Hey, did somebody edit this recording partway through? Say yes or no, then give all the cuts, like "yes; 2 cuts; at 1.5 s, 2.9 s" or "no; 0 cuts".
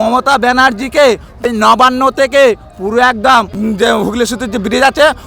yes; 2 cuts; at 1.8 s, 3.6 s